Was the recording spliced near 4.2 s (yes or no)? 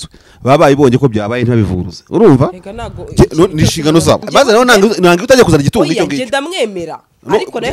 yes